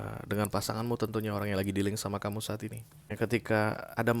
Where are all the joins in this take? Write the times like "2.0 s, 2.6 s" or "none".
3.0 s